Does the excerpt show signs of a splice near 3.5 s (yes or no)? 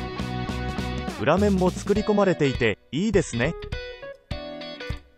yes